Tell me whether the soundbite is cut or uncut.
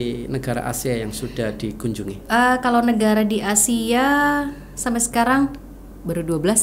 uncut